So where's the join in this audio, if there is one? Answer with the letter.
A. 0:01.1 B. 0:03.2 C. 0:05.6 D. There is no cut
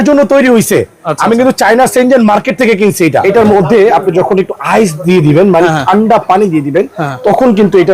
B